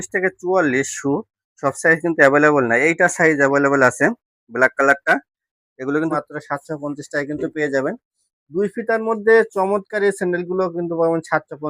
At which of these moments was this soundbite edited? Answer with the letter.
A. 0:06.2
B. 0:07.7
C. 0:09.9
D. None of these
A